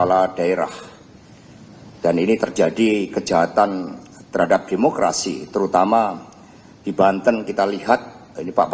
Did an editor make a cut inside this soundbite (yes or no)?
no